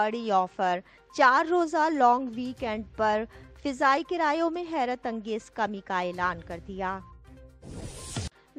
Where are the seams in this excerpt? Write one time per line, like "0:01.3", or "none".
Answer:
0:07.1